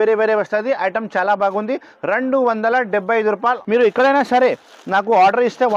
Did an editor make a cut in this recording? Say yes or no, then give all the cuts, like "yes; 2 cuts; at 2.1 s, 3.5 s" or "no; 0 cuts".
yes; 1 cut; at 3.6 s